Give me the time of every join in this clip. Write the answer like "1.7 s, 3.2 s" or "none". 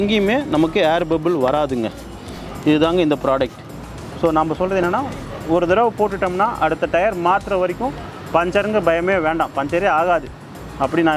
none